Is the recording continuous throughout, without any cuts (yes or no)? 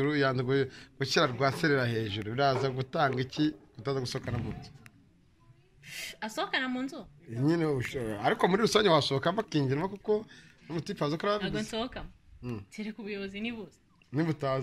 yes